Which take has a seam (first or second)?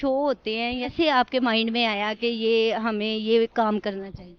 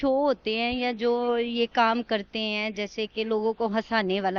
first